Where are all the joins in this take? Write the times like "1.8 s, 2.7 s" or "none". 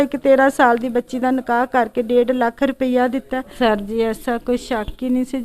3.4 s

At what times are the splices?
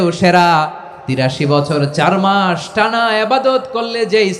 1.2 s

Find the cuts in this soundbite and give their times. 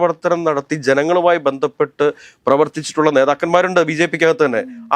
none

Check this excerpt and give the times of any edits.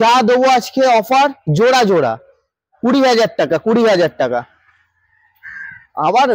none

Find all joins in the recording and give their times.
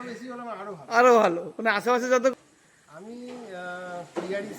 2.3 s

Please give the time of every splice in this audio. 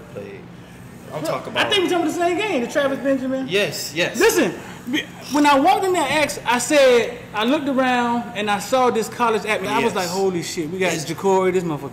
9.7 s

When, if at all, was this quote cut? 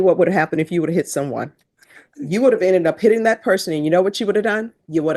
none

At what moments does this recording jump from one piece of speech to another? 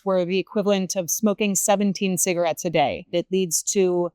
3.0 s

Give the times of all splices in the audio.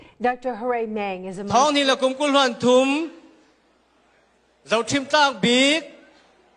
1.4 s

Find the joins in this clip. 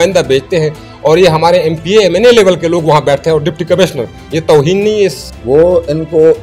5.3 s

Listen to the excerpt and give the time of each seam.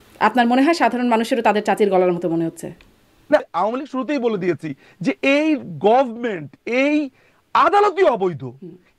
3.4 s

